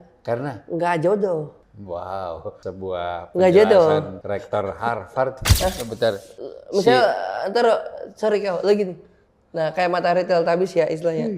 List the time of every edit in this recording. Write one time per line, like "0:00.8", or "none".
0:01.7
0:02.6
0:04.2
0:05.4